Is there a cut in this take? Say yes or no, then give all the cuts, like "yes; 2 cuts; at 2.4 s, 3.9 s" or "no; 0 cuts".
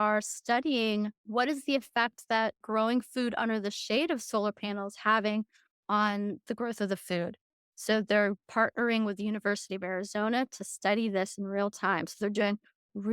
yes; 2 cuts; at 1.2 s, 2.6 s